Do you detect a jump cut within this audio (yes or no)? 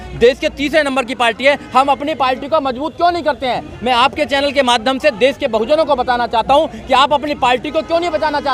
no